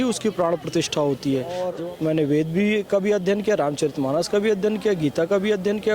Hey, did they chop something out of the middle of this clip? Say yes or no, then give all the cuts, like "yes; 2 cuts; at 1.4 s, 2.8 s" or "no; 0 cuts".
yes; 1 cut; at 1.7 s